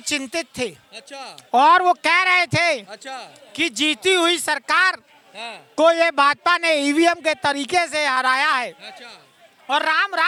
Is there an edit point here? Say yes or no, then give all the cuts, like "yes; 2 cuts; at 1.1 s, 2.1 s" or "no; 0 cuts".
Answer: no; 0 cuts